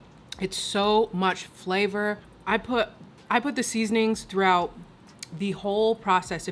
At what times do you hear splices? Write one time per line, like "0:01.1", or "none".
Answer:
0:02.3